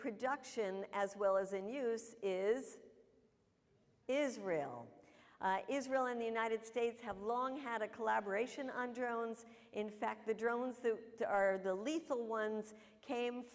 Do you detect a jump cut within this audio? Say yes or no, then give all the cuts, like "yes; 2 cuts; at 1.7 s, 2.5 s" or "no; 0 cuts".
no; 0 cuts